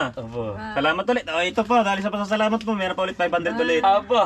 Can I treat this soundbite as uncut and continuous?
yes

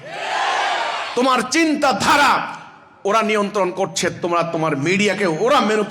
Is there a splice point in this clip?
no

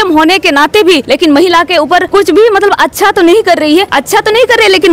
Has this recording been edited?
yes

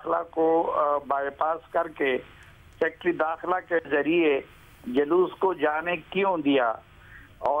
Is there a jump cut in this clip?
no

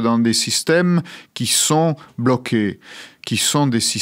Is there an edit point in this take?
no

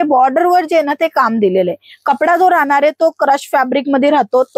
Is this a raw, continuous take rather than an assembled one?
yes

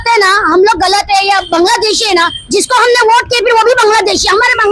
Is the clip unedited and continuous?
yes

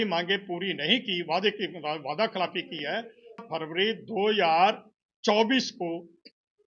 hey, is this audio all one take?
no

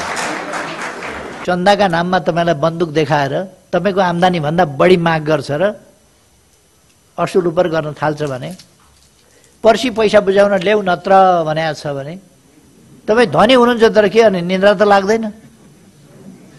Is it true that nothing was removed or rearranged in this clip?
no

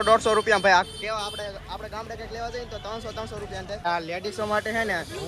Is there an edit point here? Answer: yes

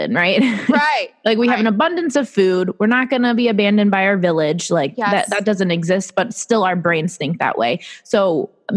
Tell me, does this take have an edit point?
no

